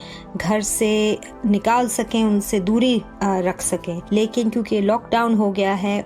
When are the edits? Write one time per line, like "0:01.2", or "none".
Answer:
0:03.9